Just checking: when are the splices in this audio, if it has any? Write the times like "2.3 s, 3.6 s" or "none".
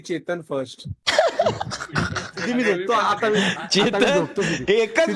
1.0 s